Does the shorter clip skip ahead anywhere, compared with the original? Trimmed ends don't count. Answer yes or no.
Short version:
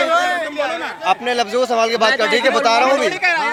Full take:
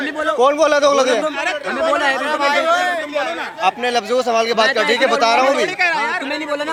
no